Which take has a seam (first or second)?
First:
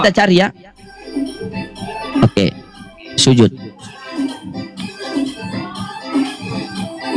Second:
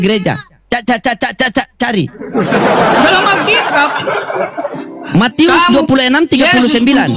second